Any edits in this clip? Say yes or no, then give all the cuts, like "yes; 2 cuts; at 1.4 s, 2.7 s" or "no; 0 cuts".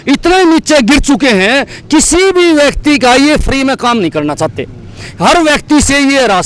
no; 0 cuts